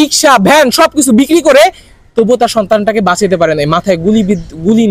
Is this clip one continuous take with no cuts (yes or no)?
yes